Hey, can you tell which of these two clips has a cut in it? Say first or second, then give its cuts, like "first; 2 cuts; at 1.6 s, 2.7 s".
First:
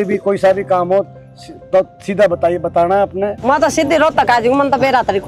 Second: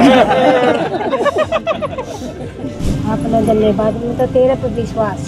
second; 1 cut; at 2.8 s